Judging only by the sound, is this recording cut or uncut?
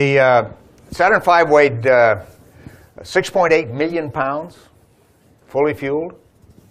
cut